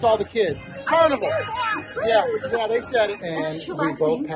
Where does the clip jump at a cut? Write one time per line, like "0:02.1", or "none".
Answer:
0:03.2